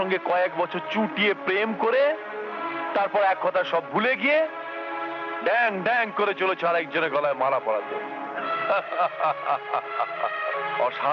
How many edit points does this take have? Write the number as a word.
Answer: zero